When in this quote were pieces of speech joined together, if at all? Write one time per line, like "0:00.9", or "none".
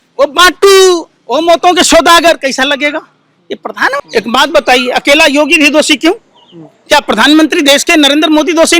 0:04.0